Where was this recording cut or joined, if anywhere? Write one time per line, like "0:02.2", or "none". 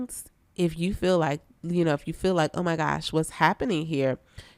none